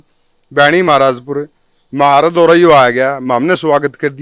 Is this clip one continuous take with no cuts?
yes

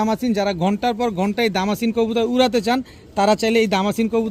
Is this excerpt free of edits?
yes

